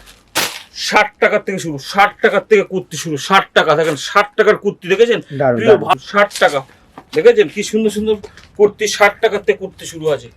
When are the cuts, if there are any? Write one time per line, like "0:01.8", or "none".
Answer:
0:06.0

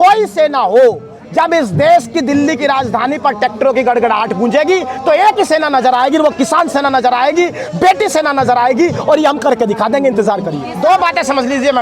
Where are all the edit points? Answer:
0:10.6

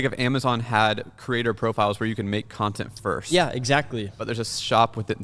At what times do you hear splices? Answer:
none

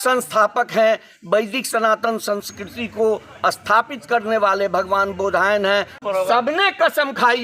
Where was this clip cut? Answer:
0:05.9

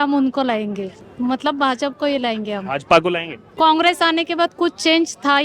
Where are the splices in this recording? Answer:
0:01.0
0:03.4

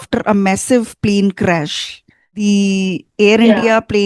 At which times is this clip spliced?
0:02.4

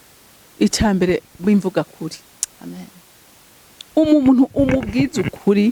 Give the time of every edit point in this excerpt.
none

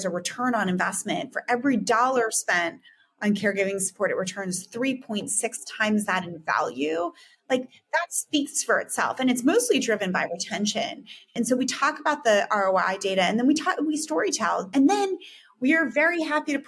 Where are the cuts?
0:11.3
0:14.7

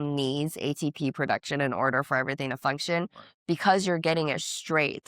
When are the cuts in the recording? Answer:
none

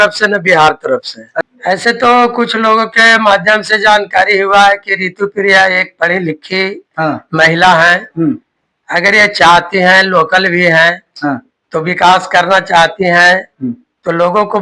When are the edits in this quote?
0:01.5

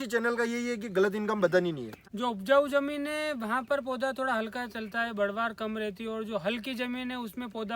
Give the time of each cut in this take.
0:02.0

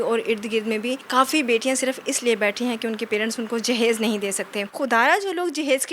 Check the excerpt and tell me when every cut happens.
0:01.0
0:04.6

